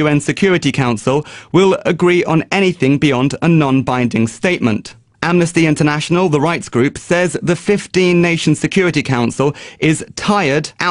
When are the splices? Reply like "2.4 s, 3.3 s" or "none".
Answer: 8.9 s